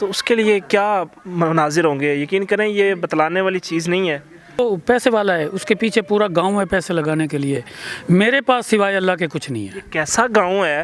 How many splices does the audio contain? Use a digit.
1